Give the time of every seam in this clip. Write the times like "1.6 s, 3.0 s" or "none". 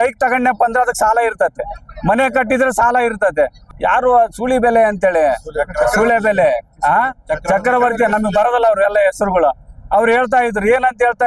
3.7 s